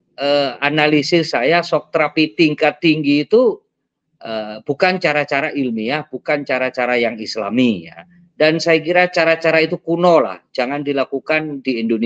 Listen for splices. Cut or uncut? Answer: uncut